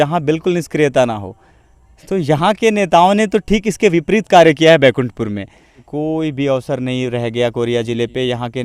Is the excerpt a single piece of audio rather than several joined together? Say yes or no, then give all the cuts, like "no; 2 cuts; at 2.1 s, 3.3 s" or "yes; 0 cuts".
no; 1 cut; at 5.8 s